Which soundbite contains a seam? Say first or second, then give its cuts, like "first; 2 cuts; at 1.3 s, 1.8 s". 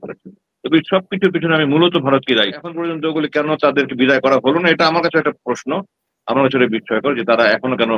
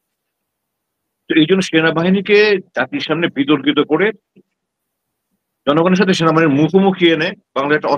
first; 1 cut; at 2.9 s